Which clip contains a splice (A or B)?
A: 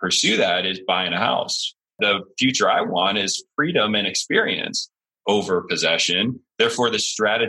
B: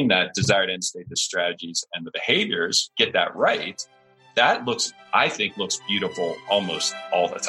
A